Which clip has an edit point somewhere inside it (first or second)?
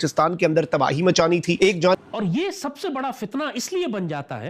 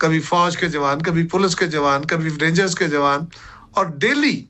first